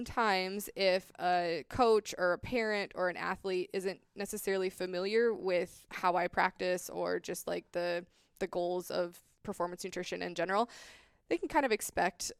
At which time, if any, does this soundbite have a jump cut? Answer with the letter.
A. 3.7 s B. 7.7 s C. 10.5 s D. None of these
D